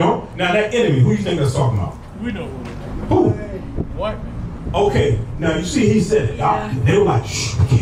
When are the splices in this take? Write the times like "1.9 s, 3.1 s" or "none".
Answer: none

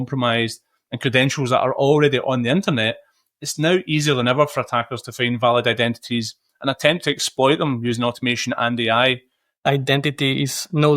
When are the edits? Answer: 9.6 s

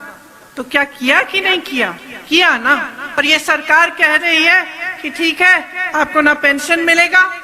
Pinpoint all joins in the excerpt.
3.2 s

